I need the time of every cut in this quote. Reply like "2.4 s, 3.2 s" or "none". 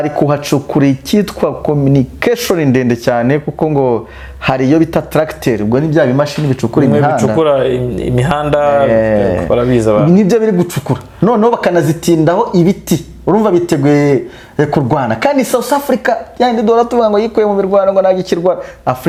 none